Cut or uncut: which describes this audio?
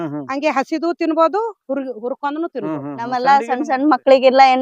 cut